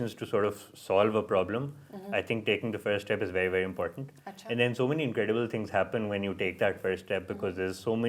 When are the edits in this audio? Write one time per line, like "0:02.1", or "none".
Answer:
none